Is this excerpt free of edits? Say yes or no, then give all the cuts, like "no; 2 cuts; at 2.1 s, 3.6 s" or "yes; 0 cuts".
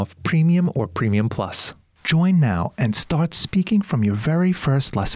yes; 0 cuts